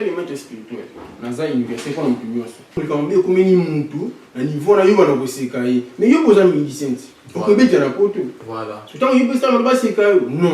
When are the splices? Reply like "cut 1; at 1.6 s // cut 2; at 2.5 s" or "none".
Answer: cut 1; at 2.8 s